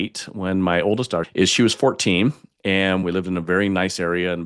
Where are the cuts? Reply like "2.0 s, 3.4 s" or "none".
1.3 s, 3.0 s